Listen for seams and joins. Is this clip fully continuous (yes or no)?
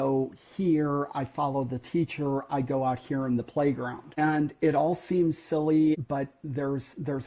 no